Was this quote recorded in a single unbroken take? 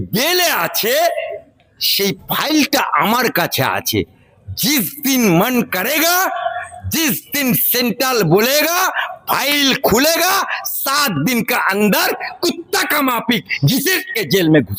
yes; 0 cuts

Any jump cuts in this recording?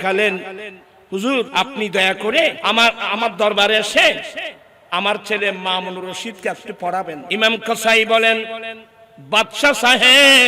yes; 3 cuts; at 1.5 s, 2.6 s, 7.2 s

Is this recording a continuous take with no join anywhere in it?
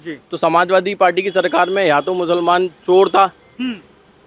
yes; 0 cuts

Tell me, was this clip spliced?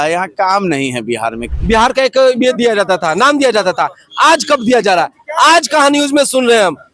yes; 1 cut; at 1.5 s

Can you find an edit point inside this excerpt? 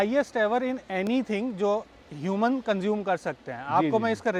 no; 0 cuts

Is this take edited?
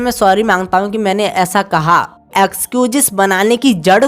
yes; 1 cut; at 2.2 s

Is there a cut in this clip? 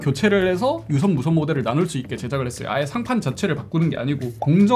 no; 0 cuts

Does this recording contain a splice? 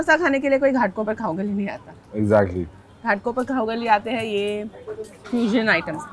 no; 0 cuts

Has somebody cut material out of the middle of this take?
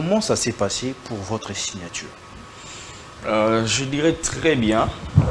no; 0 cuts

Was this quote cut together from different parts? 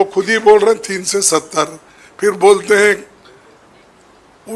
no; 0 cuts

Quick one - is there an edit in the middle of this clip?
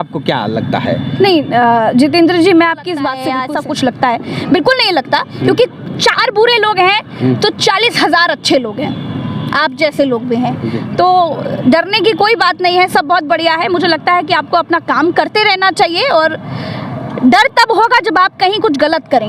yes; 1 cut; at 3.3 s

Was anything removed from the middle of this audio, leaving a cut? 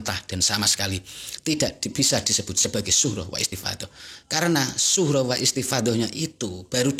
no; 0 cuts

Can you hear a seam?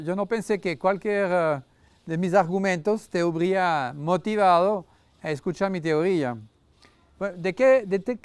no; 0 cuts

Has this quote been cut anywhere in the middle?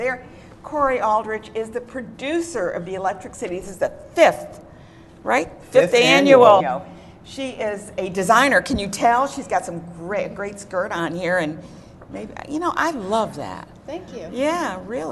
no; 0 cuts

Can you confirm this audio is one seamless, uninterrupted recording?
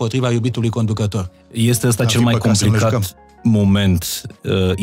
no; 1 cut; at 1.4 s

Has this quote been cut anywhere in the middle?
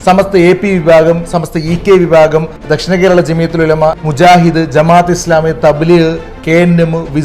yes; 2 cuts; at 2.6 s, 4.0 s

